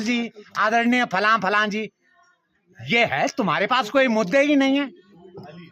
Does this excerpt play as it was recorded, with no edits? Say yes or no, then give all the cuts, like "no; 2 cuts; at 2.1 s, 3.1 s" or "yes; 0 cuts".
yes; 0 cuts